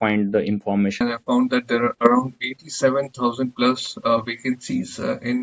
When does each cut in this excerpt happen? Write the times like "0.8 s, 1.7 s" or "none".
1.0 s